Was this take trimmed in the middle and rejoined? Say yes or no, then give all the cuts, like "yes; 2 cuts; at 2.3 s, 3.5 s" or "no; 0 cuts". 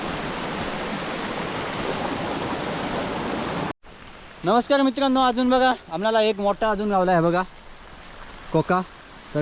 yes; 1 cut; at 3.7 s